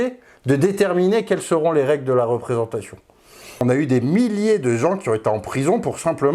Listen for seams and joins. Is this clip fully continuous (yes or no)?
no